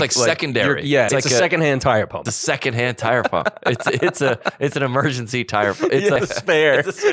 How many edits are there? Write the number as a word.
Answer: three